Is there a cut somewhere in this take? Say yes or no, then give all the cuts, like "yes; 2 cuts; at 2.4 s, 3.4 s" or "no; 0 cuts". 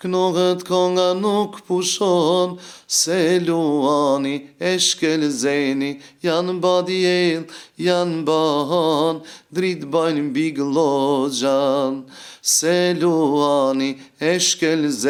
no; 0 cuts